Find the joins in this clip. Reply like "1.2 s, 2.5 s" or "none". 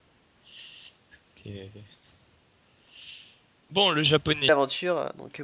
none